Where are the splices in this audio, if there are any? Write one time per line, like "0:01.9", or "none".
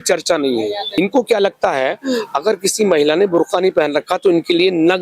0:01.0